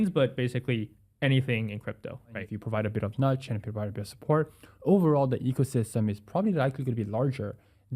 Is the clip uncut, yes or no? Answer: no